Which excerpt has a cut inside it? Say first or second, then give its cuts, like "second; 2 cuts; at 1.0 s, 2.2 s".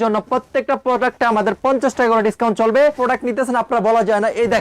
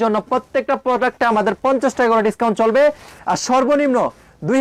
first; 1 cut; at 3.0 s